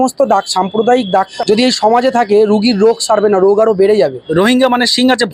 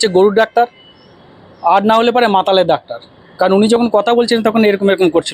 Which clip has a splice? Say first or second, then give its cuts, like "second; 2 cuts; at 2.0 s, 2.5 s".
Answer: first; 2 cuts; at 1.3 s, 4.2 s